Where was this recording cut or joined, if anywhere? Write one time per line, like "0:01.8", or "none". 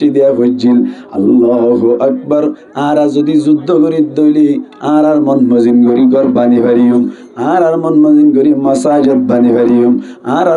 none